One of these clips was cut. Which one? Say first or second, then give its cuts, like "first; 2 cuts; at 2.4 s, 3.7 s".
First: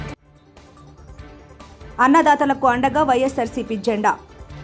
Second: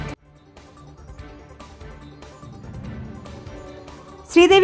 second; 2 cuts; at 1.8 s, 2.9 s